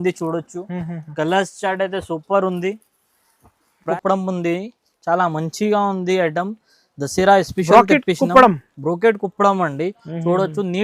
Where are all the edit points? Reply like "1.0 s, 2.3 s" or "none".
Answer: 3.8 s